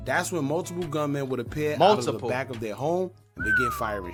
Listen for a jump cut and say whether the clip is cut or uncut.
uncut